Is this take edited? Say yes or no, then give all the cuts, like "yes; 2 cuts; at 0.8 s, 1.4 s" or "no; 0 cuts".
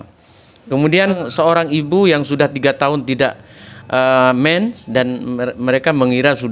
yes; 1 cut; at 1.2 s